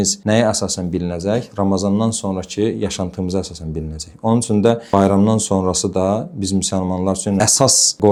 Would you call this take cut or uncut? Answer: uncut